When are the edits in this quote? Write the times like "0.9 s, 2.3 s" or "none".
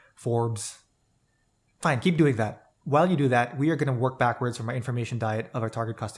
none